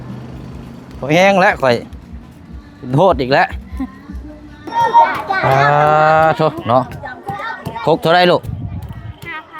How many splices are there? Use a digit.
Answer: 1